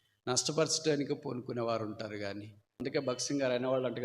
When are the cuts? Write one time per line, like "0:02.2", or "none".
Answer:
0:02.7